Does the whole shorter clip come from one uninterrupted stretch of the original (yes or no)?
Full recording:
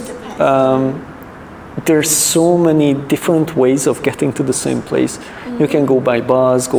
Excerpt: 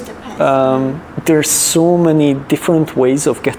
no